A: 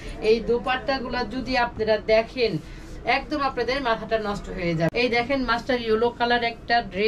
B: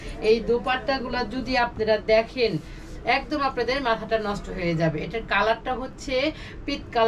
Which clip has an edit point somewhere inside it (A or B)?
A